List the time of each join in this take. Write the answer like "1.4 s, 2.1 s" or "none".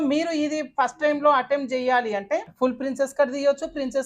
2.5 s